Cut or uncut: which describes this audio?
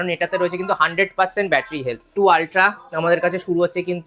cut